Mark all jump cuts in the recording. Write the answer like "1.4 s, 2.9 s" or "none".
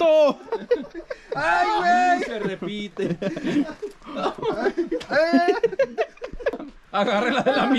6.5 s